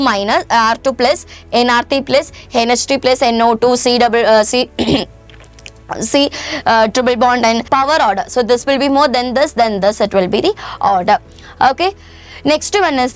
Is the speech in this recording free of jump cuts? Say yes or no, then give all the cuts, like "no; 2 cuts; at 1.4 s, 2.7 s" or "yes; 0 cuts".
no; 1 cut; at 7.6 s